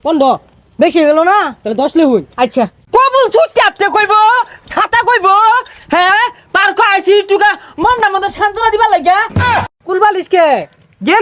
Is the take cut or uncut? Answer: cut